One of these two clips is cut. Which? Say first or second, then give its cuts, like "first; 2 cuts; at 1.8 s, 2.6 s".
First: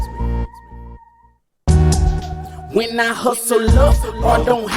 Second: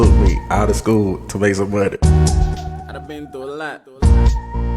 second; 1 cut; at 2.0 s